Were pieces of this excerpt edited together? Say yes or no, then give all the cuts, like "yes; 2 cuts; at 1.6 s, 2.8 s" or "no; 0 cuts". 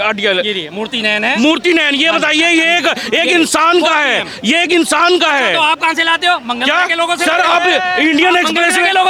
no; 0 cuts